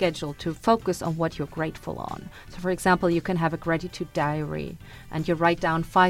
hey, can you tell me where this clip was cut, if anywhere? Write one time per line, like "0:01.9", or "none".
none